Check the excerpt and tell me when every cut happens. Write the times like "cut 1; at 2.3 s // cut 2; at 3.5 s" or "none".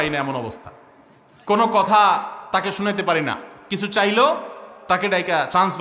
none